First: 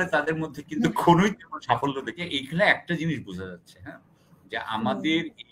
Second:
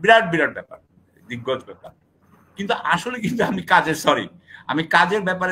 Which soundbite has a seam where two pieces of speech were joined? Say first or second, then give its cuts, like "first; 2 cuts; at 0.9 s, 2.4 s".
first; 1 cut; at 2.2 s